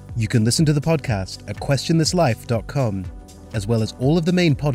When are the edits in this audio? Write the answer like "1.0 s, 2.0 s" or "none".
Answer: none